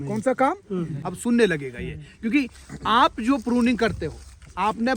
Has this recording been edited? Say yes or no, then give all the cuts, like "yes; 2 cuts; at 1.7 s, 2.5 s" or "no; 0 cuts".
yes; 1 cut; at 1.0 s